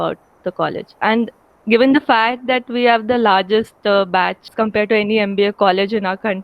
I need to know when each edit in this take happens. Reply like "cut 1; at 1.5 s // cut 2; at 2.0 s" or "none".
cut 1; at 4.5 s